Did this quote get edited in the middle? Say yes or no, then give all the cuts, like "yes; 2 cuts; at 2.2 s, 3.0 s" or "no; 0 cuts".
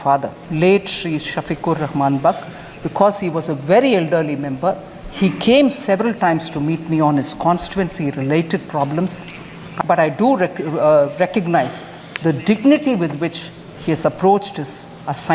yes; 1 cut; at 9.6 s